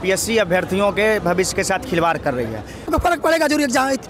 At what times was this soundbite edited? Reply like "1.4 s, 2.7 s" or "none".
2.9 s